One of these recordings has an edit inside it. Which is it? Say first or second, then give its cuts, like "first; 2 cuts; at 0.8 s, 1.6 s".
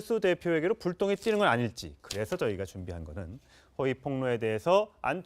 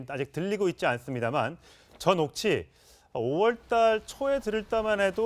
second; 1 cut; at 3.6 s